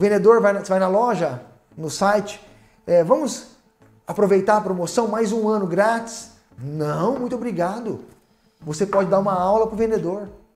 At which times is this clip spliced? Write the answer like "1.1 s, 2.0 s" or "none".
none